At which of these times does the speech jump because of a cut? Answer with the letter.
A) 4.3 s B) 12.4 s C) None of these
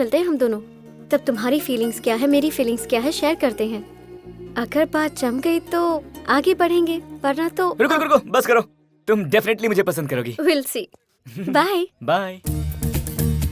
B